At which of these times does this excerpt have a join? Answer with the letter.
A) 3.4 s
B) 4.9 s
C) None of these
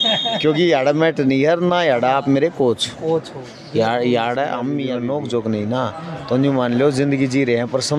B